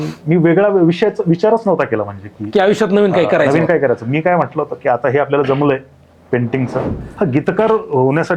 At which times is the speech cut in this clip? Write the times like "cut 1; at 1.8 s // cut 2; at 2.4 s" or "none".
cut 1; at 7.0 s